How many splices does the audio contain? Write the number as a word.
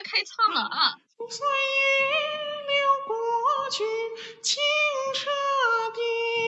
one